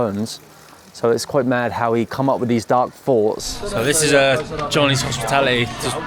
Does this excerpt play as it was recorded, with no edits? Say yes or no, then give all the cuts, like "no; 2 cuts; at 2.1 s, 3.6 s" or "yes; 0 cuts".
no; 1 cut; at 3.6 s